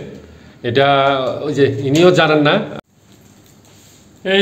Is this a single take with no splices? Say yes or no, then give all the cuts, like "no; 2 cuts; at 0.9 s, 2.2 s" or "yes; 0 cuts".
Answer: no; 1 cut; at 2.8 s